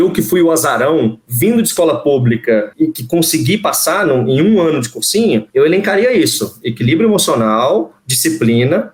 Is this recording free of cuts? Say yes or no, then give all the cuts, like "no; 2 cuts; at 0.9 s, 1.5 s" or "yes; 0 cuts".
yes; 0 cuts